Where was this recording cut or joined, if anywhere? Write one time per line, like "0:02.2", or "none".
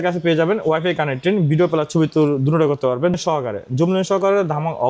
0:03.2